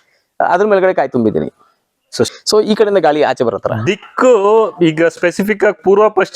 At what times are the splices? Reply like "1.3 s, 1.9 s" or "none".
2.3 s